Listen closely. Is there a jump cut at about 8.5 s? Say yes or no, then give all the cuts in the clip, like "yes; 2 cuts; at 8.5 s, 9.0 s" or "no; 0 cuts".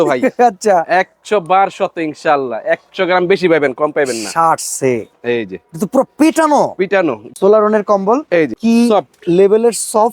yes; 2 cuts; at 7.3 s, 8.5 s